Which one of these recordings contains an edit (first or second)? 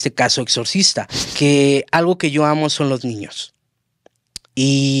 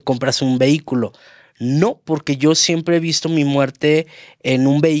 first